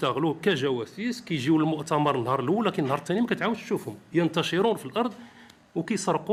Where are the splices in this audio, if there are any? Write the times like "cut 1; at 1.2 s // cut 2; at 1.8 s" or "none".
none